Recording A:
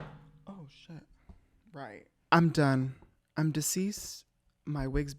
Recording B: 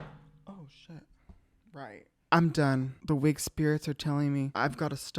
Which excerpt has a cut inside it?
B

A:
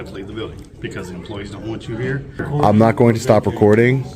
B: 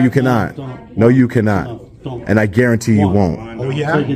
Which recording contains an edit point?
A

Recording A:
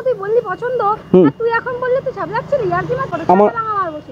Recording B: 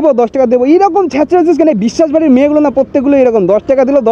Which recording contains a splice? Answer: A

